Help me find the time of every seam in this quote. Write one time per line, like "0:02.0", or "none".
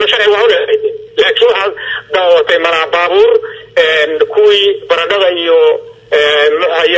0:01.0